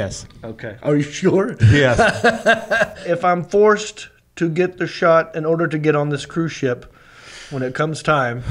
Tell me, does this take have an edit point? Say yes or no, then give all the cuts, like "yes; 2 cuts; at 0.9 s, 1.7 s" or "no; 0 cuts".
yes; 1 cut; at 3.0 s